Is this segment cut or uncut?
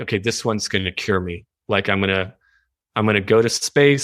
uncut